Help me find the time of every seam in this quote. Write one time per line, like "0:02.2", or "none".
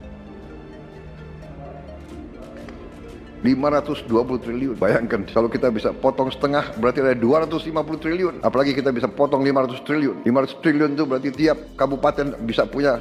none